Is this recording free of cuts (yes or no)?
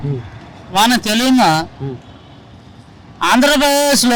yes